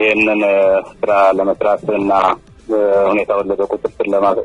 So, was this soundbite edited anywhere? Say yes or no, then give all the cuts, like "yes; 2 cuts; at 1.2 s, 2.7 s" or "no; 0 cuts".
no; 0 cuts